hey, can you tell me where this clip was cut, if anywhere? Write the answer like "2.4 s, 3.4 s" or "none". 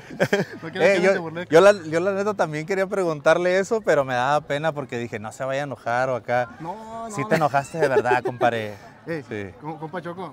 none